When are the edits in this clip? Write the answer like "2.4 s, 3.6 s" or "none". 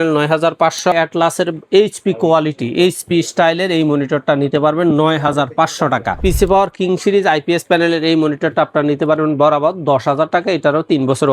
0.9 s, 6.2 s